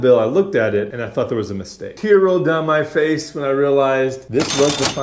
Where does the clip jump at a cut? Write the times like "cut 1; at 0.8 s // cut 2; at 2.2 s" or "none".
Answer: cut 1; at 0.9 s // cut 2; at 1.9 s